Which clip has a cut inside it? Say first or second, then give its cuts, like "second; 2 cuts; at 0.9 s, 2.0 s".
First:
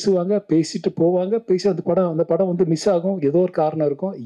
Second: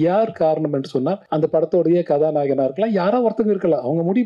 second; 1 cut; at 1.2 s